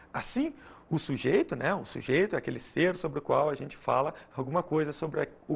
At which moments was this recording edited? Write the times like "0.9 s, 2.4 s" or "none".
2.5 s